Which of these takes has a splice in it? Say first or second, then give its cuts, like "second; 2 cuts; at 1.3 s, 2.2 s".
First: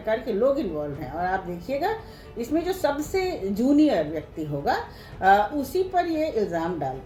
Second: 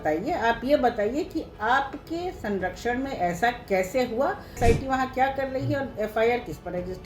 second; 1 cut; at 4.6 s